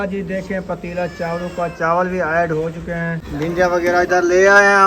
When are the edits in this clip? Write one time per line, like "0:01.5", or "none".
0:03.2